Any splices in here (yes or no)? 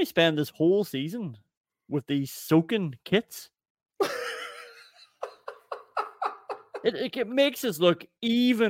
no